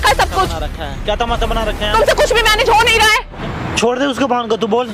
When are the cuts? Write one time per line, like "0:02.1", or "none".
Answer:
0:03.3